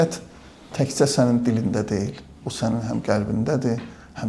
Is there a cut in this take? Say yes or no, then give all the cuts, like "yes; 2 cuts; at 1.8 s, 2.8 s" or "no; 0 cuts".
no; 0 cuts